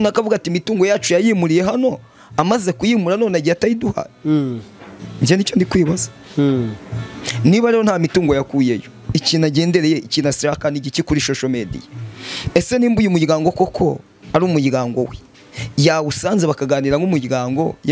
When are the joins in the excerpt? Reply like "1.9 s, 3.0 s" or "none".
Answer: none